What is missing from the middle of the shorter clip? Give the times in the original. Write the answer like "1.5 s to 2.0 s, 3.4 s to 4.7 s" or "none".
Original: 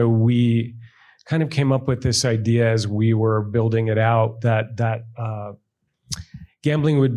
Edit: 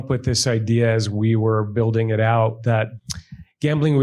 4.7 s to 6.0 s